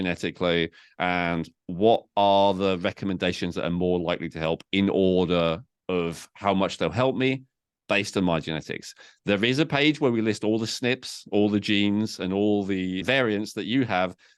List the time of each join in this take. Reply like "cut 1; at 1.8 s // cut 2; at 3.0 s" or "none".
cut 1; at 13.0 s